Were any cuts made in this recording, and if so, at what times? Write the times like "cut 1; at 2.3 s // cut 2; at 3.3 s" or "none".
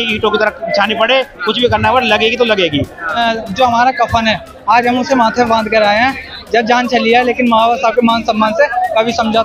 cut 1; at 3.2 s